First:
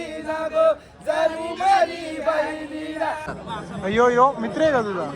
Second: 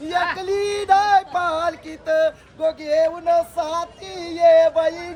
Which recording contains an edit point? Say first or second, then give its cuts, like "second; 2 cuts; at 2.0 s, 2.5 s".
first; 1 cut; at 3.3 s